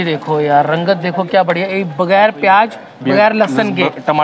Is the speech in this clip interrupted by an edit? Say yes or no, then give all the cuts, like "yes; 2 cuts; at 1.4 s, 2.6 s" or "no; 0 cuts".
no; 0 cuts